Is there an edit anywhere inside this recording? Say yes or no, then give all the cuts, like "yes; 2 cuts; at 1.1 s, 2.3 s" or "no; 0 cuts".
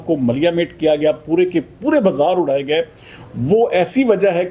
no; 0 cuts